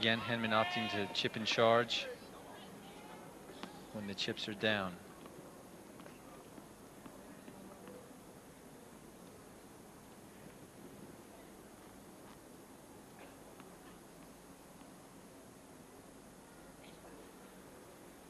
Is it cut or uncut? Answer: cut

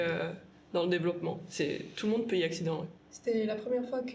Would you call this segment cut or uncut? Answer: cut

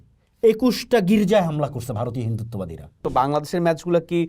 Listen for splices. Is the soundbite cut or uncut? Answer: cut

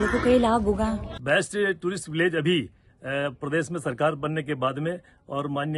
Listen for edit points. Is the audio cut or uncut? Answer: cut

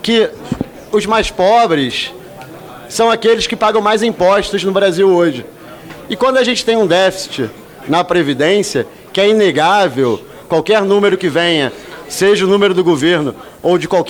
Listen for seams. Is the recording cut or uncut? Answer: uncut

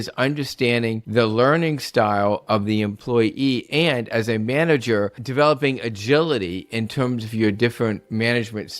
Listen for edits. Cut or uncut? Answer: cut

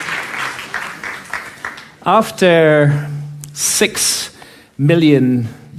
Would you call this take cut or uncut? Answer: uncut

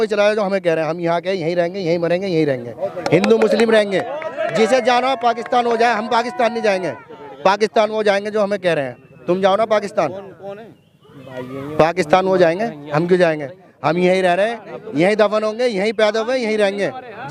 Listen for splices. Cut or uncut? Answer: uncut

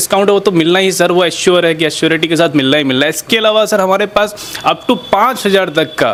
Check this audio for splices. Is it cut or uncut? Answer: uncut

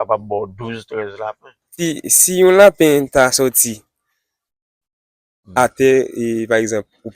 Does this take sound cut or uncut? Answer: cut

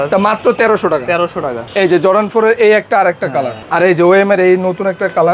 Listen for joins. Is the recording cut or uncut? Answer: cut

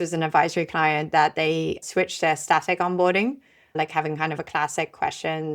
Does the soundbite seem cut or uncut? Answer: cut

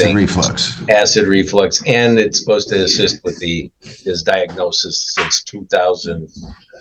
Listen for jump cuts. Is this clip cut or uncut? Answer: uncut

